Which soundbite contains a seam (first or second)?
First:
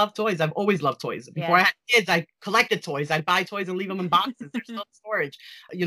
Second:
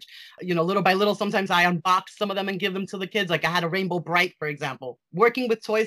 second